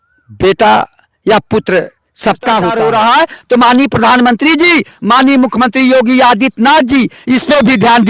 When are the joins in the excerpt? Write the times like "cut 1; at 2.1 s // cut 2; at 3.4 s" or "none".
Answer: cut 1; at 2.7 s